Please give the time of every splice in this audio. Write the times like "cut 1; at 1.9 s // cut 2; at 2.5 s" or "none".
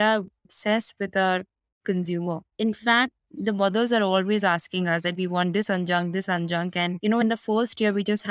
cut 1; at 7.2 s